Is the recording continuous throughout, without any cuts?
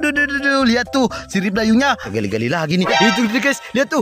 no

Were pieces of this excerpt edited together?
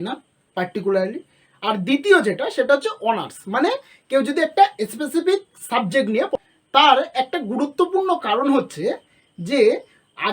yes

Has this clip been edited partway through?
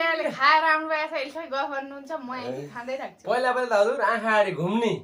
no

